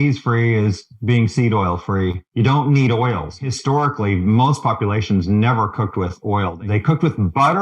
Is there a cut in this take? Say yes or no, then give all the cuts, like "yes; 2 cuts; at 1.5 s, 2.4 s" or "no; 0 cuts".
yes; 3 cuts; at 2.2 s, 3.3 s, 6.6 s